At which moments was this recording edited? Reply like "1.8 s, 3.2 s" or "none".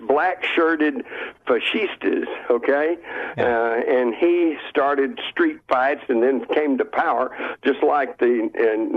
6.2 s